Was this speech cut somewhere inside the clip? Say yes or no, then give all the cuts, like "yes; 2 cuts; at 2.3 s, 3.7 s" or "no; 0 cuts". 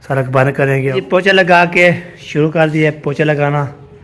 yes; 1 cut; at 0.9 s